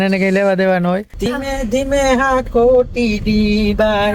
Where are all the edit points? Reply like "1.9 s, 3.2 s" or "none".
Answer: 1.3 s

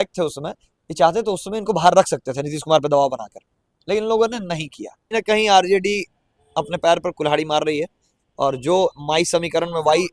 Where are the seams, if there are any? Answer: 5.1 s

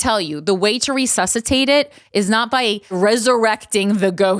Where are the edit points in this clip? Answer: 2.9 s

